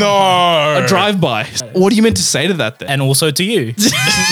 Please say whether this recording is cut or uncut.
cut